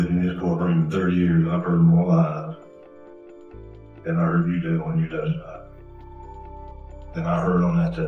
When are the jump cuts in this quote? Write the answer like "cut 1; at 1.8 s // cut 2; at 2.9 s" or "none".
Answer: cut 1; at 5.6 s // cut 2; at 7.1 s